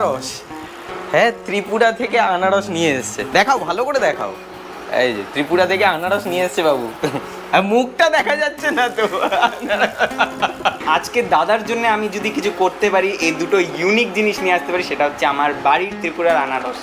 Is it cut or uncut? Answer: cut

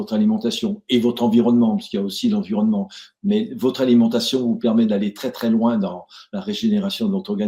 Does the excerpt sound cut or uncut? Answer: uncut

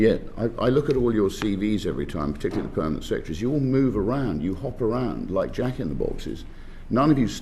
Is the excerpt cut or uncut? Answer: uncut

